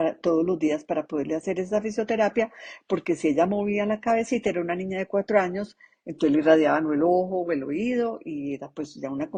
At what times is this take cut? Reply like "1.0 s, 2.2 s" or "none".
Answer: none

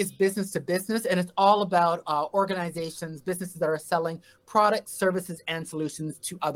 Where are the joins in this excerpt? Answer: none

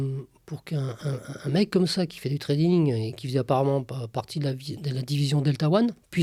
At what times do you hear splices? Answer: none

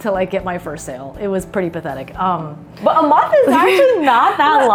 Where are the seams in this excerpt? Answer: none

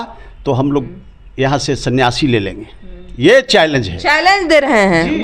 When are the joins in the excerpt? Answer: none

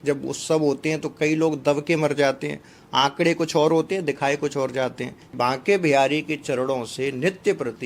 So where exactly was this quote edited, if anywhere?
5.3 s

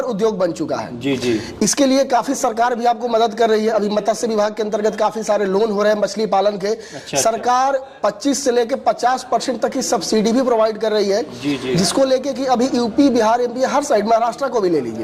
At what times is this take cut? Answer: none

